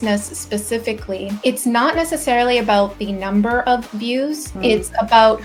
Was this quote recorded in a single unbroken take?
yes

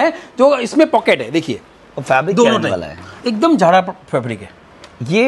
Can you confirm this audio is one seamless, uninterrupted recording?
yes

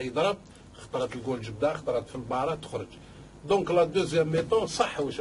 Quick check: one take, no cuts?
no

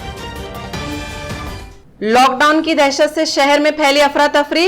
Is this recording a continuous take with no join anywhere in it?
yes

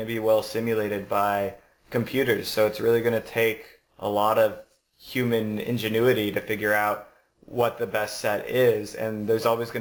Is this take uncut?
yes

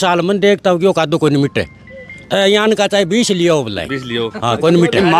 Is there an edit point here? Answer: no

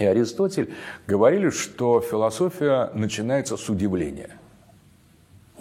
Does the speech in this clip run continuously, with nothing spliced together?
yes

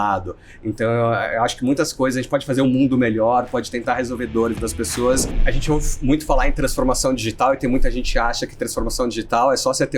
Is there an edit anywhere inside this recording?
yes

